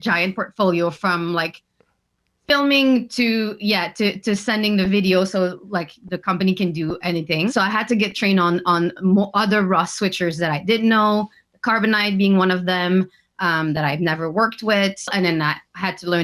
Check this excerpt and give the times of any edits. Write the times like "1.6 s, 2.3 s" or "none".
7.5 s, 15.1 s